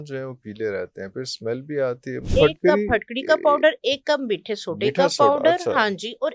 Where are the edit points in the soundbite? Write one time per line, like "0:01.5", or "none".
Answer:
0:02.3